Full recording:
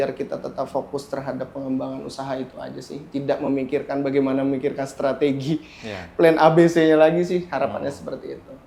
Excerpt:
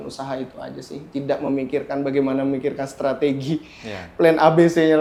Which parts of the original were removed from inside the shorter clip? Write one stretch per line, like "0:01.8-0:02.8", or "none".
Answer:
none